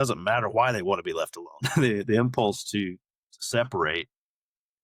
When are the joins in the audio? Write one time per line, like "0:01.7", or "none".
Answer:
none